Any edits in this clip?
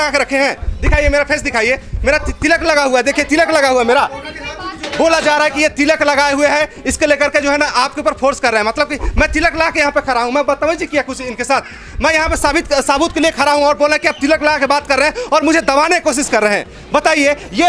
no; 0 cuts

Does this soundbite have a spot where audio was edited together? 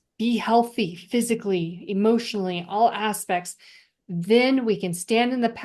no; 0 cuts

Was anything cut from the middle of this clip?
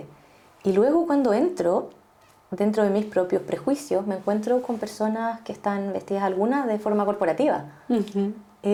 no; 0 cuts

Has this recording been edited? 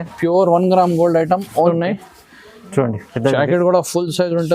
yes; 1 cut; at 1.5 s

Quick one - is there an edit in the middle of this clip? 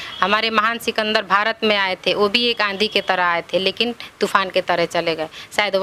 no; 0 cuts

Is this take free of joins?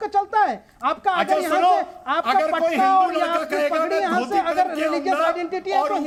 yes; 0 cuts

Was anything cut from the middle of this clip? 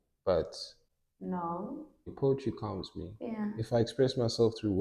yes; 1 cut; at 2.1 s

